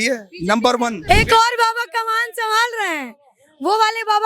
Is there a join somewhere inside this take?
yes; 1 cut; at 1.0 s

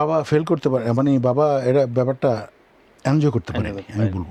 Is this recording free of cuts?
yes; 0 cuts

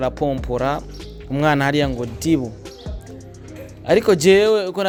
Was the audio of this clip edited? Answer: no; 0 cuts

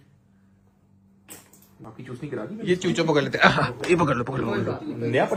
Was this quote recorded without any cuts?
yes; 0 cuts

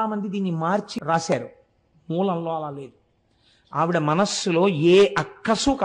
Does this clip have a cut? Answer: yes; 1 cut; at 0.9 s

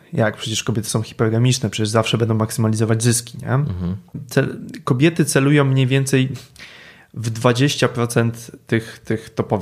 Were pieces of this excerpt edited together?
yes; 1 cut; at 4.2 s

